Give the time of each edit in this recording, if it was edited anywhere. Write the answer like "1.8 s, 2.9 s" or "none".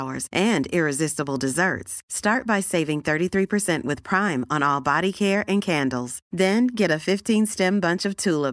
none